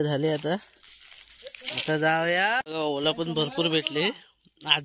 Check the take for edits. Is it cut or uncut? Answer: cut